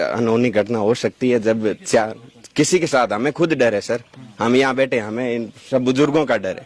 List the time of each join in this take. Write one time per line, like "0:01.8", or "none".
none